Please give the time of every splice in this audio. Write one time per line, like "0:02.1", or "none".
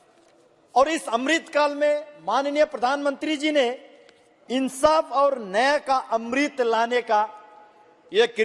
none